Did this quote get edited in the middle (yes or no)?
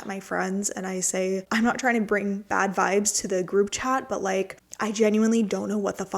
yes